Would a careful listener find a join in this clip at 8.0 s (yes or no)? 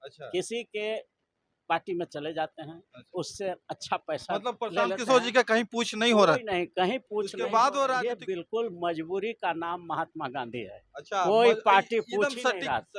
yes